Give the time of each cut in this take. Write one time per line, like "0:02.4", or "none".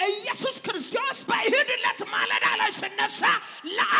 0:00.9